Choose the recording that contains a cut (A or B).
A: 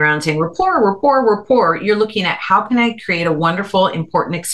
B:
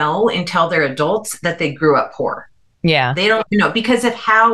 B